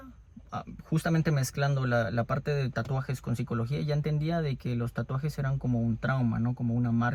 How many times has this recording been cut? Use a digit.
0